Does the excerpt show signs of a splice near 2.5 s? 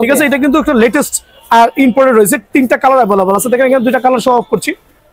no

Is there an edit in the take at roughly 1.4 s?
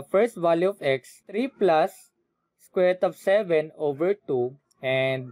yes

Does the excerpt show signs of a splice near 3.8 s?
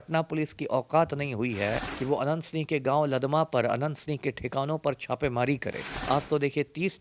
no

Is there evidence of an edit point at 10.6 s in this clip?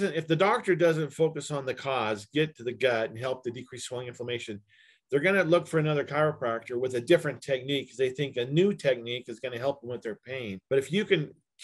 yes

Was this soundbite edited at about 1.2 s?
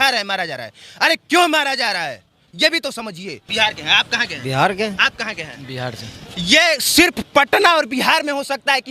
no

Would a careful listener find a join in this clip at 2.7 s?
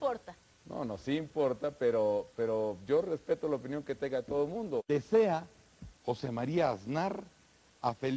no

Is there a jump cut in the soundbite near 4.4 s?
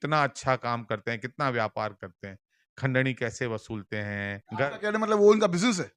yes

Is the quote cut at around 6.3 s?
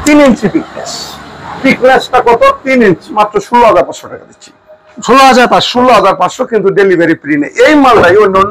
no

